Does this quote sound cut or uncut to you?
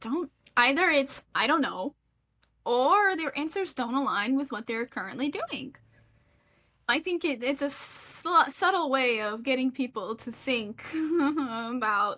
cut